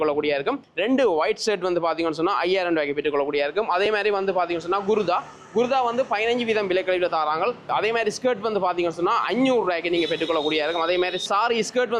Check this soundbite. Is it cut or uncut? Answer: uncut